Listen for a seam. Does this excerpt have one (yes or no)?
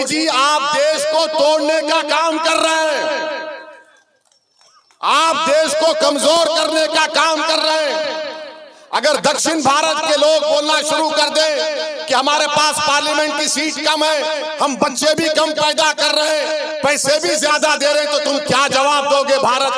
no